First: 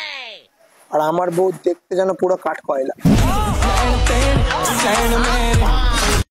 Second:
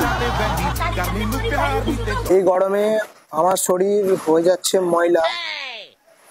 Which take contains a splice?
second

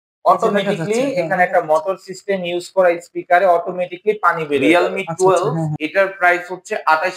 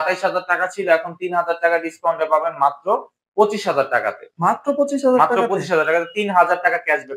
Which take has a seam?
first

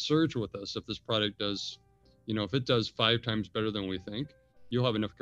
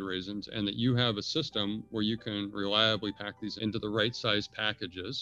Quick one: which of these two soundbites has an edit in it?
second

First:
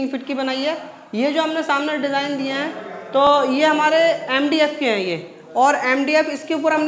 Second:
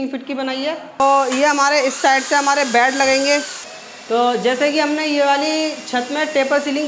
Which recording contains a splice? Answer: second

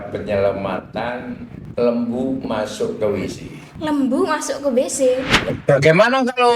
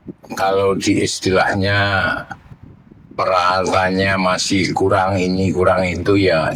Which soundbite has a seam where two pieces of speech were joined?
first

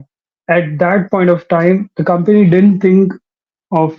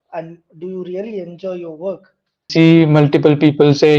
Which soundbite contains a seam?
second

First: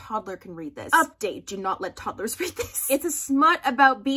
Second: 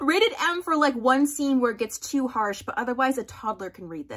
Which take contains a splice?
first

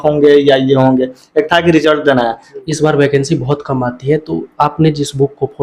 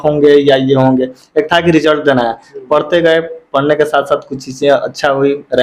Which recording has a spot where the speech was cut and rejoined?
first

